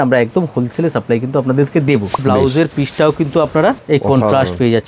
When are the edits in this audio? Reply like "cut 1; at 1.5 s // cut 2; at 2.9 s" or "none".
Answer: cut 1; at 2.3 s // cut 2; at 3.8 s